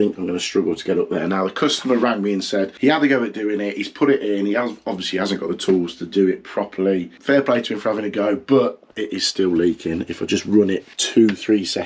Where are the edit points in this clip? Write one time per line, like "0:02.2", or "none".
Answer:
0:02.7
0:07.1
0:10.9